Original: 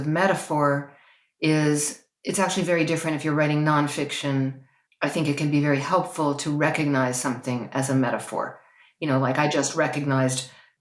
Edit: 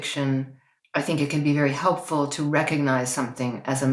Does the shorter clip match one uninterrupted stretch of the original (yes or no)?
yes